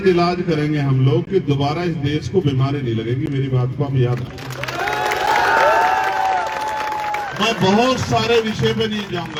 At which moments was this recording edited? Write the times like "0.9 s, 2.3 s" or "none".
none